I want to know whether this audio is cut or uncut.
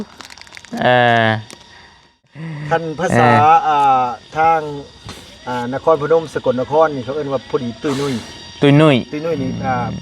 cut